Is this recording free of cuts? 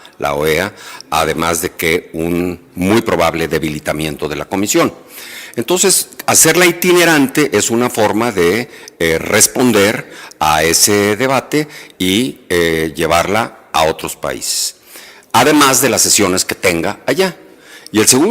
yes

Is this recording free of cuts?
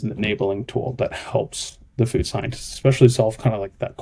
yes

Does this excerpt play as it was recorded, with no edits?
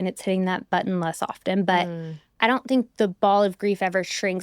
no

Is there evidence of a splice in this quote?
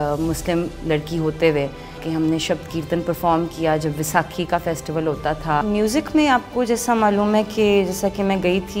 yes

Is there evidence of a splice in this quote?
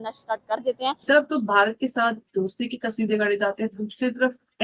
yes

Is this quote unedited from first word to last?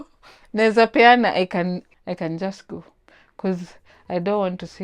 no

